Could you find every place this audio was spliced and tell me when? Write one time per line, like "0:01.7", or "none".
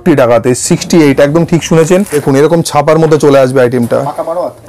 0:02.2